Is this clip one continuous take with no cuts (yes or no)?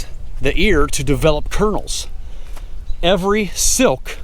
yes